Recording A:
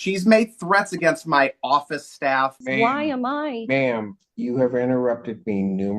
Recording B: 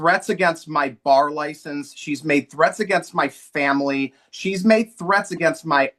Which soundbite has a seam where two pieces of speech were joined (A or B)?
A